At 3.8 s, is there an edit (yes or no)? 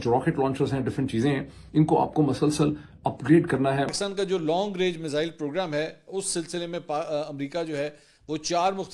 yes